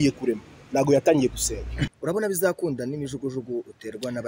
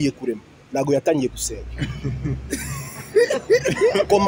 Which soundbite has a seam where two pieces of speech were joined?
first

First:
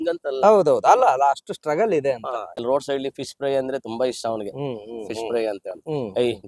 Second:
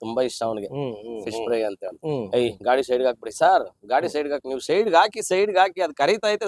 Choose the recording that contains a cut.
first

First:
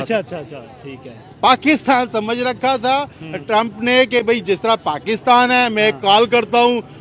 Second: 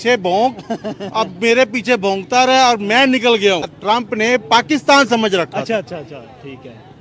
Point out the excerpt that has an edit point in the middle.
second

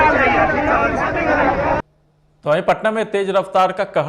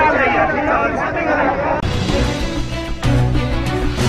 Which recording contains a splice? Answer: first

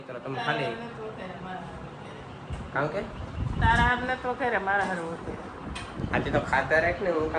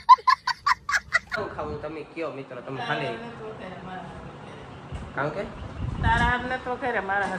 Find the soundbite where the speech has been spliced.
second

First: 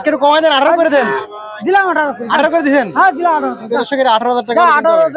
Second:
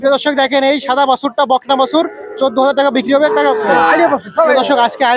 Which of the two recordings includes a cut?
second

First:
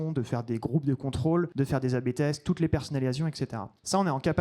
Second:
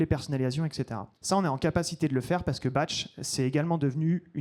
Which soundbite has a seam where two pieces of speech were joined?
first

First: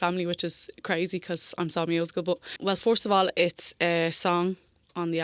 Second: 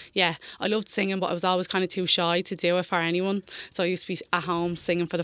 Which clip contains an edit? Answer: first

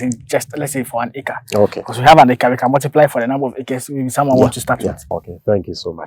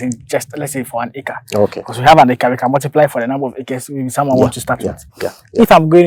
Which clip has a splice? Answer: first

